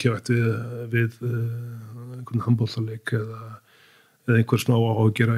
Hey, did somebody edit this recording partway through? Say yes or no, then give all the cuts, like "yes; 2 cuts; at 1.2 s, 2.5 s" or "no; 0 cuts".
no; 0 cuts